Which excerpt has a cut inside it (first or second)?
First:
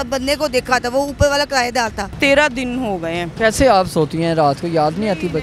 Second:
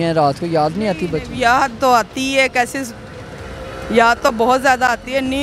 first